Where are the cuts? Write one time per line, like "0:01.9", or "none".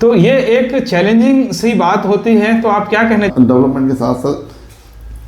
0:03.3